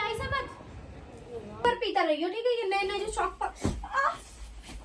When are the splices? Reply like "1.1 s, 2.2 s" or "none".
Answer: 1.6 s